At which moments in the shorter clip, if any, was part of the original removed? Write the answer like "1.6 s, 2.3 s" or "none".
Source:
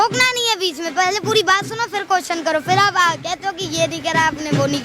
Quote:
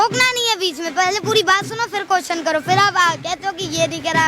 none